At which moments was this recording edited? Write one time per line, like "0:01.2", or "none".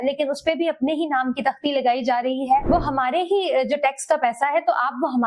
0:02.6